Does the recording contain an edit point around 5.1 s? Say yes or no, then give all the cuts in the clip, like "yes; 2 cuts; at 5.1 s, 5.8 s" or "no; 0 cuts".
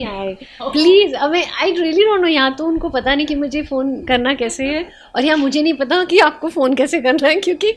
no; 0 cuts